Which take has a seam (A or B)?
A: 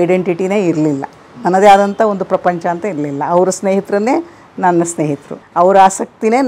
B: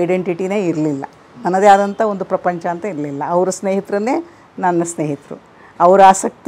A